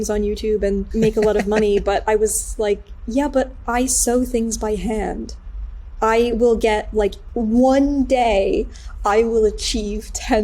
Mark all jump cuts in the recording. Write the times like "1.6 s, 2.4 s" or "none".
0.9 s, 7.3 s